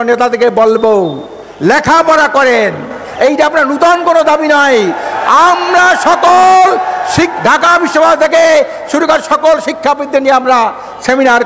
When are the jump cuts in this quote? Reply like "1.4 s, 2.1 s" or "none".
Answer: none